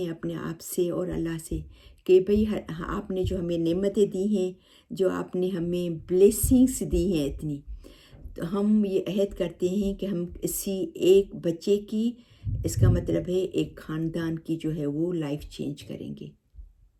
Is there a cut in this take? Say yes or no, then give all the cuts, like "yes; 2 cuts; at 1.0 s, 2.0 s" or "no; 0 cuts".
no; 0 cuts